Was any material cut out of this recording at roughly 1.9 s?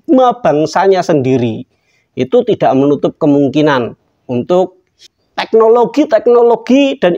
no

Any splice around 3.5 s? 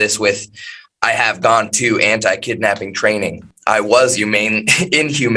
yes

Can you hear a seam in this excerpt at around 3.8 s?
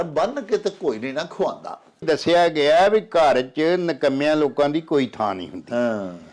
no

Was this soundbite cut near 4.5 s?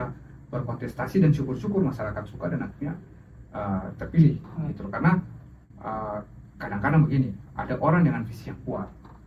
no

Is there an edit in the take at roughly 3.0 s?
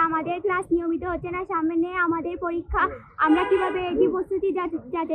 no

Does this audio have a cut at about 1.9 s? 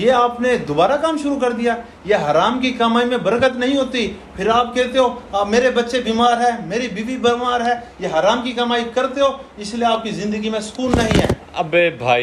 no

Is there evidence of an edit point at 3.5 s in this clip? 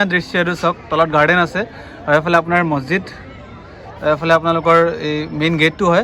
no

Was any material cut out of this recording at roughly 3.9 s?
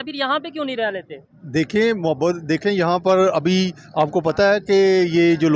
no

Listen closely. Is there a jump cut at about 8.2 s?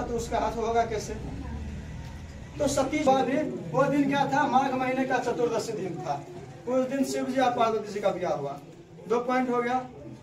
no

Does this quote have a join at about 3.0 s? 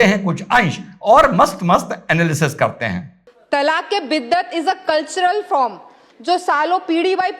yes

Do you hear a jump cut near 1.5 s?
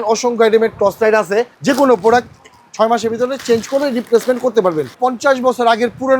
yes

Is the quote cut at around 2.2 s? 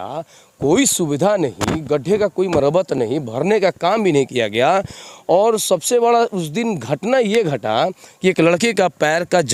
no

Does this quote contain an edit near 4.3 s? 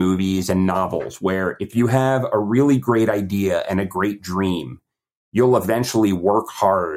no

